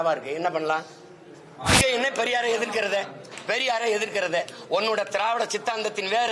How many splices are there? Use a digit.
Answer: 1